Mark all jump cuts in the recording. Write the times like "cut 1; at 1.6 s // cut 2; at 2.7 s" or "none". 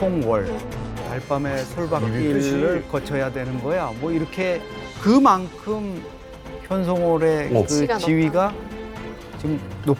cut 1; at 1.0 s